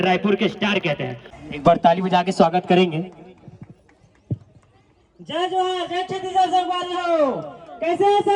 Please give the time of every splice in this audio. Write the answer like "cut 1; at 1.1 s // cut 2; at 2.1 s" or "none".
cut 1; at 1.3 s